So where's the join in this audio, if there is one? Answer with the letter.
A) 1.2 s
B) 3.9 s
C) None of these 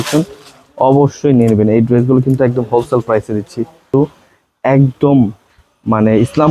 B